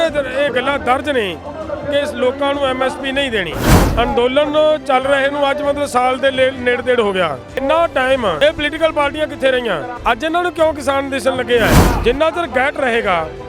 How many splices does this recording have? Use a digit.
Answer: 5